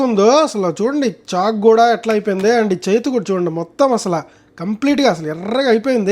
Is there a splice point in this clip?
no; 0 cuts

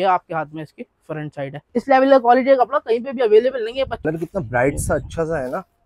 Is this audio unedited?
no; 2 cuts; at 1.7 s, 4.1 s

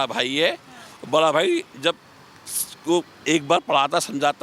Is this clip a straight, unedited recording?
yes; 0 cuts

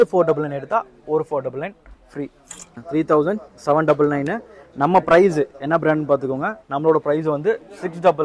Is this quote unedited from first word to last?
no; 1 cut; at 2.8 s

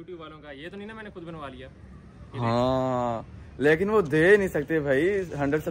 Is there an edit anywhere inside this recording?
no; 0 cuts

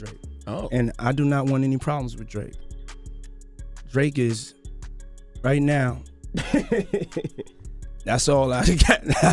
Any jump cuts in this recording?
no; 0 cuts

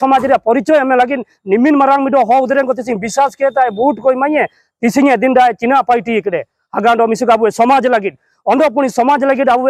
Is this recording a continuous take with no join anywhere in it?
yes; 0 cuts

